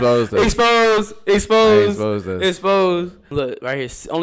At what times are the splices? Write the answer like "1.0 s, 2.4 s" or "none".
3.2 s